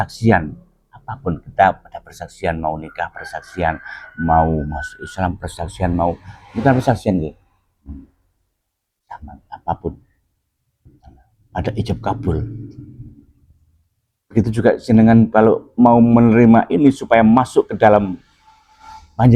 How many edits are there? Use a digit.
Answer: 0